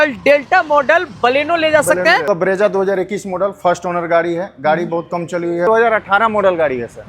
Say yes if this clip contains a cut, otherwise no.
yes